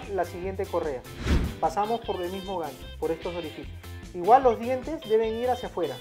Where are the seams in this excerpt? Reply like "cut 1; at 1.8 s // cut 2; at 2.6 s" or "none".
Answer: none